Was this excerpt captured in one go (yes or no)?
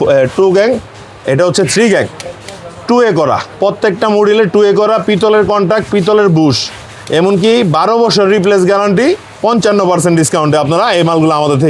yes